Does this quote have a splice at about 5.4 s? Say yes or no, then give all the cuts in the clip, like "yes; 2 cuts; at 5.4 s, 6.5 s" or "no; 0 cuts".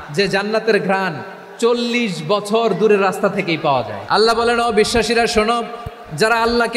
no; 1 cut; at 4.0 s